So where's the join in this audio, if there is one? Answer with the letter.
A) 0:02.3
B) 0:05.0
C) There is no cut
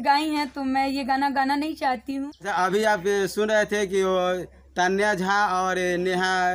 A